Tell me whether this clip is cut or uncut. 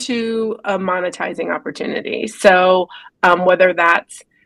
uncut